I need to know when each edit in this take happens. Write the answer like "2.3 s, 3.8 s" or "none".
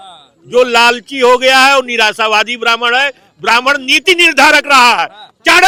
none